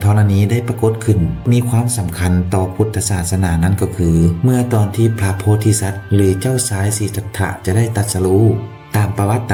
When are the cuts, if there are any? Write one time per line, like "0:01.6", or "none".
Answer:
none

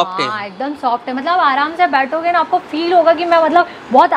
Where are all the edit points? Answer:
none

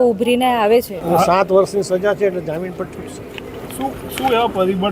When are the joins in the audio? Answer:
0:01.0

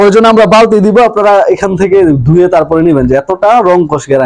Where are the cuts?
none

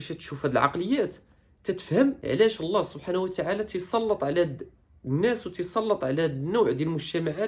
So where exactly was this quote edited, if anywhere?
0:02.2

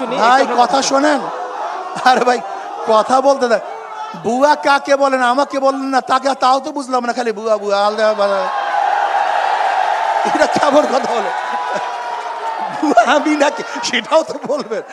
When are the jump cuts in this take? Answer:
none

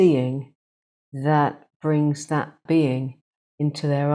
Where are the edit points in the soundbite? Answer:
0:02.6

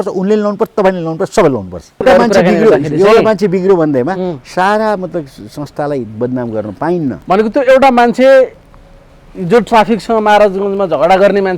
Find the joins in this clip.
0:02.0

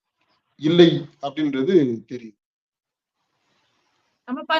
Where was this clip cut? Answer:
none

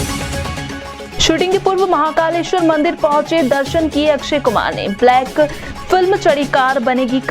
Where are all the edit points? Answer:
0:01.1

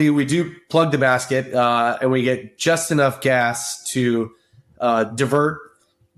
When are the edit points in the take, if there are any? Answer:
none

